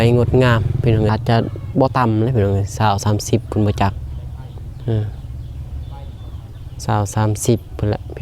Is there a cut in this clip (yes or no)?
yes